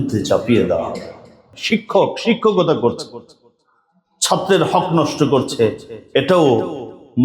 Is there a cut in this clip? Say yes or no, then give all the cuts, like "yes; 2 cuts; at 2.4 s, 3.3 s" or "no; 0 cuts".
yes; 1 cut; at 1.6 s